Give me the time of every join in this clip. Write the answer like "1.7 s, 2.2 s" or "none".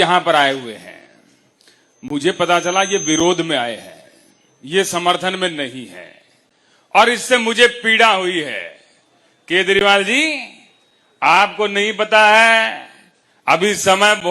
none